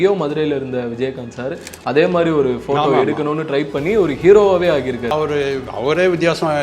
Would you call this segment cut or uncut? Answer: cut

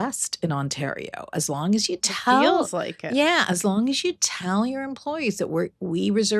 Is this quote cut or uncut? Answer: uncut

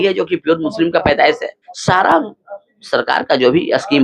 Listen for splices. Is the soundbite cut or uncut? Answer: cut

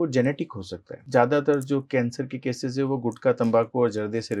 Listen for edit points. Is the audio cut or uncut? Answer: cut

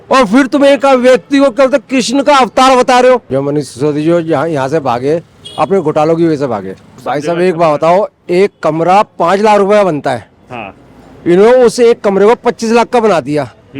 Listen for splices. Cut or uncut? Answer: cut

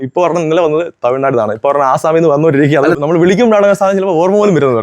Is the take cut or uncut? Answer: cut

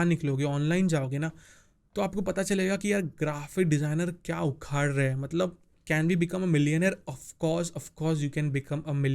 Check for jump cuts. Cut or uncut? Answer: cut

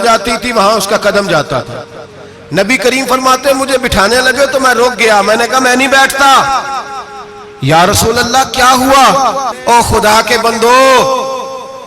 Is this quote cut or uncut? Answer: cut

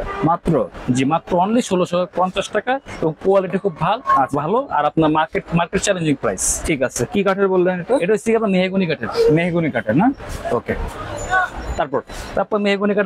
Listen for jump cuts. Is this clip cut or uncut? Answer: uncut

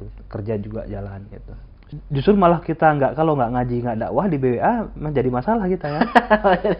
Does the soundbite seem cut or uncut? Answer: cut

